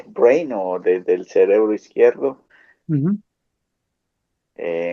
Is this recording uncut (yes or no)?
yes